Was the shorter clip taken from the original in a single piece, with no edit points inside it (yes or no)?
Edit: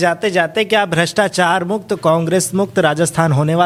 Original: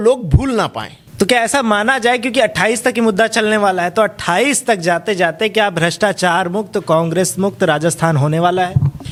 yes